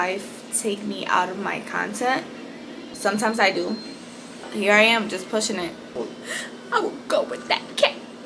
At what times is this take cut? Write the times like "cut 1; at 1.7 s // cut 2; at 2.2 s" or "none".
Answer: cut 1; at 2.8 s // cut 2; at 4.5 s // cut 3; at 6.0 s